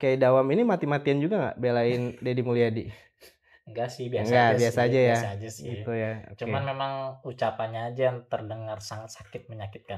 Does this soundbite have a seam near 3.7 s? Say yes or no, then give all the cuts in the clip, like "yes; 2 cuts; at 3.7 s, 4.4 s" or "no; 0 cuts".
no; 0 cuts